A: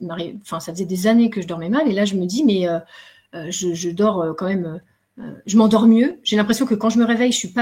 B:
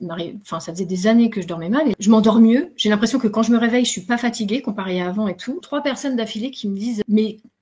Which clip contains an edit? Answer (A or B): B